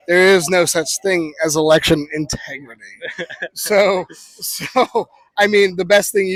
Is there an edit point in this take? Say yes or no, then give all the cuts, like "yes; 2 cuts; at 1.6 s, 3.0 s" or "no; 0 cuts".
no; 0 cuts